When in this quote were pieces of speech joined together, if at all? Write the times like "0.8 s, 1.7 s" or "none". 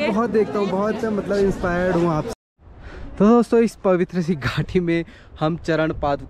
2.3 s